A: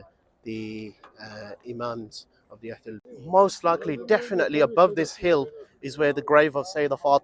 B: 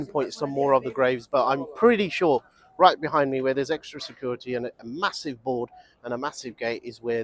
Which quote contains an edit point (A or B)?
A